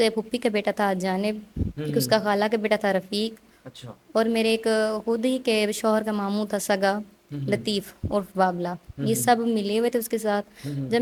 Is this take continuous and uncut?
yes; 0 cuts

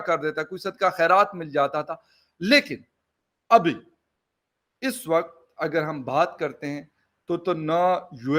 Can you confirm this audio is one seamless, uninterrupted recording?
yes; 0 cuts

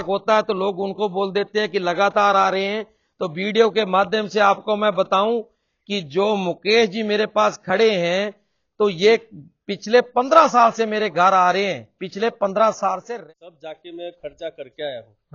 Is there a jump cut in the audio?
yes; 1 cut; at 13.1 s

